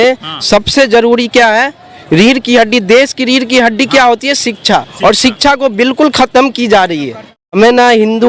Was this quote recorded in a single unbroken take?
no; 1 cut; at 7.4 s

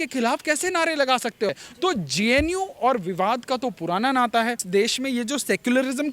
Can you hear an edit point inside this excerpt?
yes; 2 cuts; at 1.6 s, 4.6 s

